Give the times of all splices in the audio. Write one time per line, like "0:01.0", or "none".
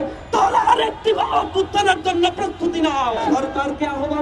0:03.2